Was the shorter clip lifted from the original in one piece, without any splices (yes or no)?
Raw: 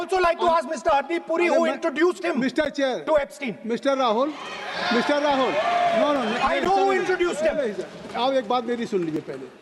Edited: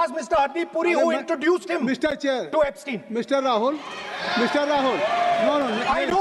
yes